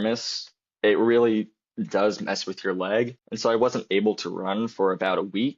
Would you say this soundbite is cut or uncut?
cut